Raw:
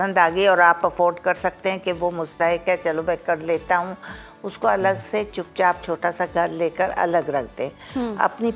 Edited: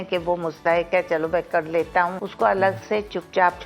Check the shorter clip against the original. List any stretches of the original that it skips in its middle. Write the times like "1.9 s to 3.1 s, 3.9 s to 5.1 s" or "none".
4.0 s to 4.5 s